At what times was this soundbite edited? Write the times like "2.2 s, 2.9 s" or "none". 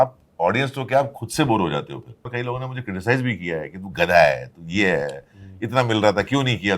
2.3 s